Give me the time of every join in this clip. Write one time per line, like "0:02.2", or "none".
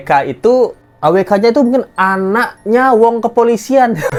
none